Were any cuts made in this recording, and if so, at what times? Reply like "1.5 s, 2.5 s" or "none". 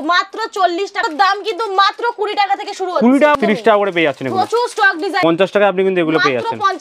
1.0 s, 3.4 s, 5.2 s